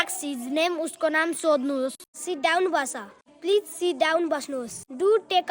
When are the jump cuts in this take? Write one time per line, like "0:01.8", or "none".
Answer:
0:02.0